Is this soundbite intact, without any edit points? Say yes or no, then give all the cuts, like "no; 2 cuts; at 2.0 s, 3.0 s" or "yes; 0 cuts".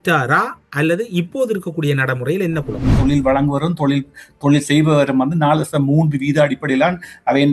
no; 1 cut; at 2.9 s